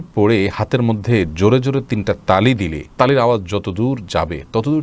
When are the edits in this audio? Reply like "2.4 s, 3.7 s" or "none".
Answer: none